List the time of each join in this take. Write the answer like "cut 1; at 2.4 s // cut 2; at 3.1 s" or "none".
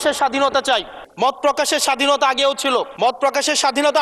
none